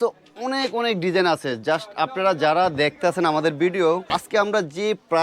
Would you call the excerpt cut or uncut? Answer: cut